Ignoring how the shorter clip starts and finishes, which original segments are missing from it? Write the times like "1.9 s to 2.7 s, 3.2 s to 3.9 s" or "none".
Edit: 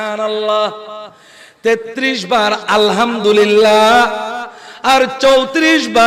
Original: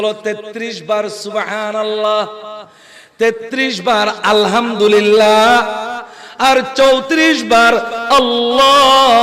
none